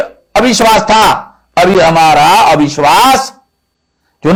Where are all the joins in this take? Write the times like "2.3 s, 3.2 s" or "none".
none